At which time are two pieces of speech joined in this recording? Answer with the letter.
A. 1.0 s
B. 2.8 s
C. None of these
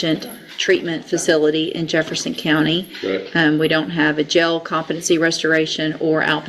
C